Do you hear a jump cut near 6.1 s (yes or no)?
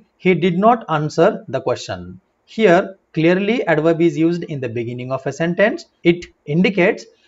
yes